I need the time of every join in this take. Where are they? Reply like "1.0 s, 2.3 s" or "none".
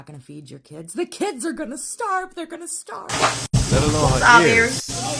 3.1 s